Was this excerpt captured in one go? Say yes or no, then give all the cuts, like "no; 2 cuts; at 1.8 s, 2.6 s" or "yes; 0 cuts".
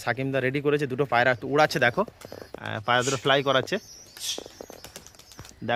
yes; 0 cuts